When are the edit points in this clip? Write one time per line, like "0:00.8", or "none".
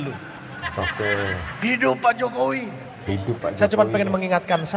0:03.4